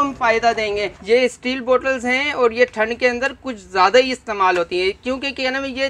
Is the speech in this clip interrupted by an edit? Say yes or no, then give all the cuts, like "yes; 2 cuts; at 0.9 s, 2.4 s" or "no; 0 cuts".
yes; 1 cut; at 0.9 s